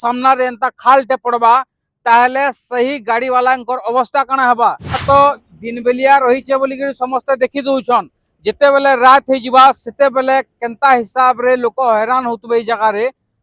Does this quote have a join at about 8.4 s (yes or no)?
no